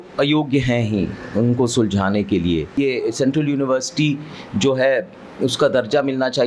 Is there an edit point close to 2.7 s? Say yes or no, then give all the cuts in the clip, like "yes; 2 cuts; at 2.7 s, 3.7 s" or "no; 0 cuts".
yes; 1 cut; at 2.7 s